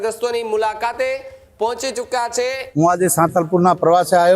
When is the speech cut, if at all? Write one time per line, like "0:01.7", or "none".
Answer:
0:02.6